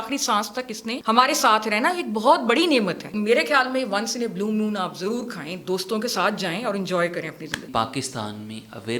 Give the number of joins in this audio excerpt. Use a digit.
3